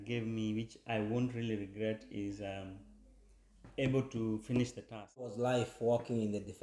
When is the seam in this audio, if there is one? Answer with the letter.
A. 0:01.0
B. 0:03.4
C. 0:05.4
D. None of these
C